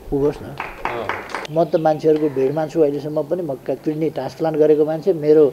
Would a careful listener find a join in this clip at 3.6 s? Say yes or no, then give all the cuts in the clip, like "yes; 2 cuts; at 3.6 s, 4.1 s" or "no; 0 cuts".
no; 1 cut; at 1.4 s